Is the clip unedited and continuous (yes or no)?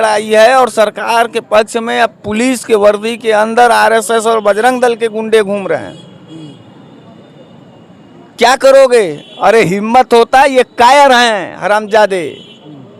yes